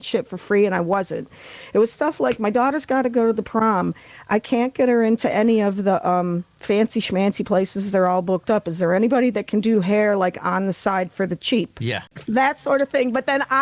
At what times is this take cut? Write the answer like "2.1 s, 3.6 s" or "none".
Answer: 12.1 s

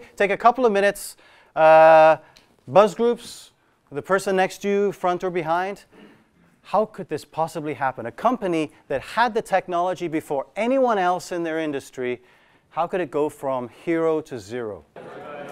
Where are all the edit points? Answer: none

